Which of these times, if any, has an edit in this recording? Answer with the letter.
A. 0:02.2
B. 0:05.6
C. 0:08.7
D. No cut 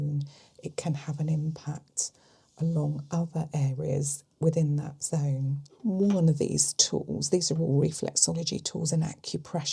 B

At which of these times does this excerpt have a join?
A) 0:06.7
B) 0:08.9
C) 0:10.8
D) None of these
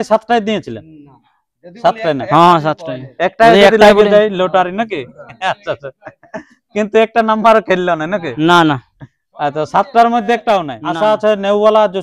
C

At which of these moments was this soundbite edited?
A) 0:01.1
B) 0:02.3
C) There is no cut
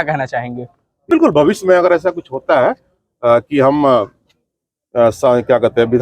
A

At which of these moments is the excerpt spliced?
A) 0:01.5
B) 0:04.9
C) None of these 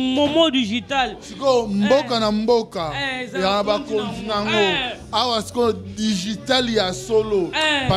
C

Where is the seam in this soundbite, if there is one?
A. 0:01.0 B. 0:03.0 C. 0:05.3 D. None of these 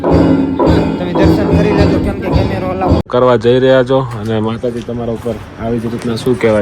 B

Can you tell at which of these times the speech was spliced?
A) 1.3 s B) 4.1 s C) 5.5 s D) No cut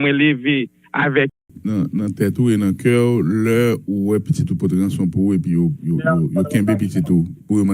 A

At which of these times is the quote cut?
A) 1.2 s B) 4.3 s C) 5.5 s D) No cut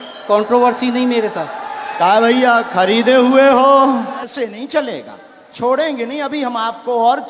B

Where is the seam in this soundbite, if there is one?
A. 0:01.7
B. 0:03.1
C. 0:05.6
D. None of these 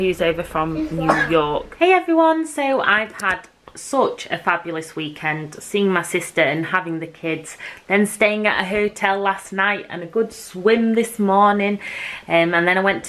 A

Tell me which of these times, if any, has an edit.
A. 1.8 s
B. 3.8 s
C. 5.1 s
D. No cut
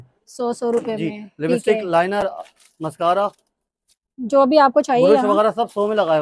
D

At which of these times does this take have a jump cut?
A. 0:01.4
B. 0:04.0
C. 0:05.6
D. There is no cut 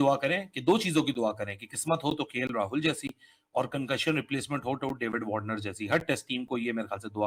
D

